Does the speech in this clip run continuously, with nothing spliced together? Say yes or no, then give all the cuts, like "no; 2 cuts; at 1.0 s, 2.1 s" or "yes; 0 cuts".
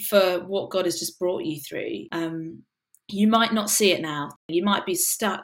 no; 2 cuts; at 2.1 s, 4.4 s